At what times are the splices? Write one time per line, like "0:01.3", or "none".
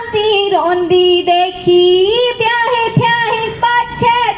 none

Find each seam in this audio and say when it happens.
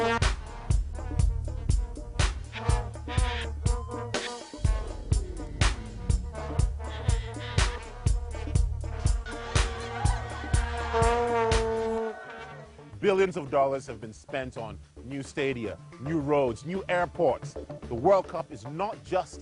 0:02.7

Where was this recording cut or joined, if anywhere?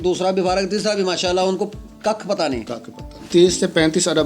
0:03.3

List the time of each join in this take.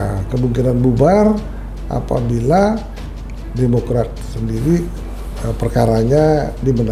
none

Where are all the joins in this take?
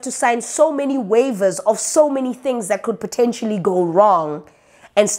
none

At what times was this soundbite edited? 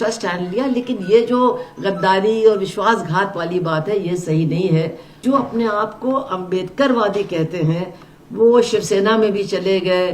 0:05.2

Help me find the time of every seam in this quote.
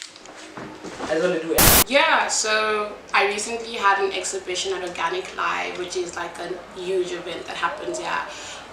0:01.6

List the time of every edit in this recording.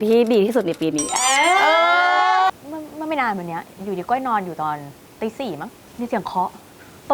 0:02.5
0:05.8

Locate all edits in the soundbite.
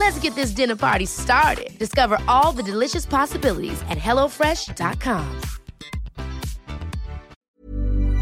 0:07.3

